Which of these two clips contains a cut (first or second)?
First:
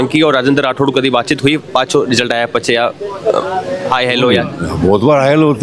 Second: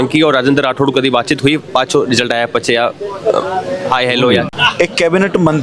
second